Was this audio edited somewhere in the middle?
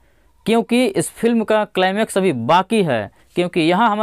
no; 0 cuts

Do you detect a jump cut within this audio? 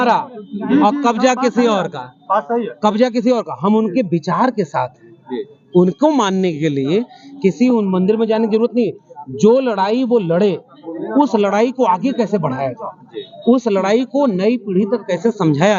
no; 0 cuts

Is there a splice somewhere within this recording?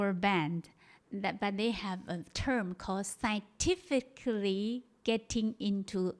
no; 0 cuts

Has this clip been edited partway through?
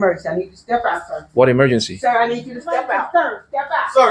yes; 1 cut; at 3.0 s

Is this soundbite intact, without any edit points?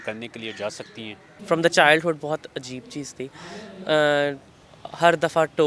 no; 1 cut; at 1.3 s

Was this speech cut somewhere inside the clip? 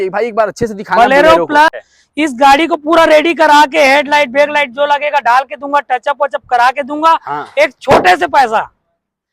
yes; 1 cut; at 1.8 s

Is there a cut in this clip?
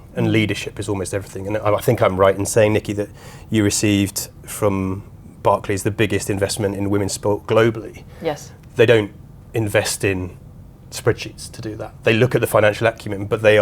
no; 0 cuts

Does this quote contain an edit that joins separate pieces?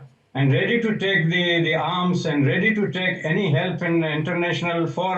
no; 0 cuts

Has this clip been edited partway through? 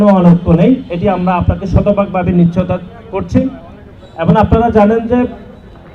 no; 0 cuts

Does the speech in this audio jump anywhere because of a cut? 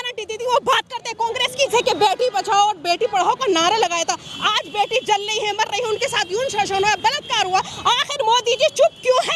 yes; 1 cut; at 1.7 s

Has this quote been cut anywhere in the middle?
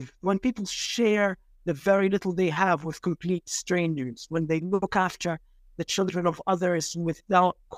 no; 0 cuts

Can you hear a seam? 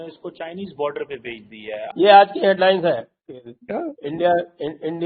yes; 1 cut; at 1.8 s

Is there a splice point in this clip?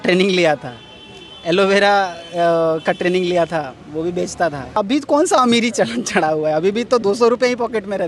yes; 1 cut; at 4.8 s

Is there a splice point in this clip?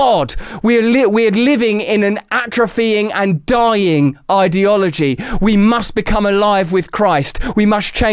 no; 0 cuts

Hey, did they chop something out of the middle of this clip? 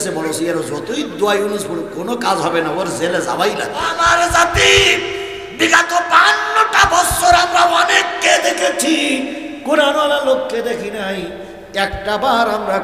yes; 1 cut; at 4.0 s

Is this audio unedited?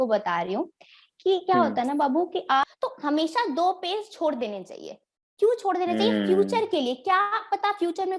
no; 1 cut; at 2.6 s

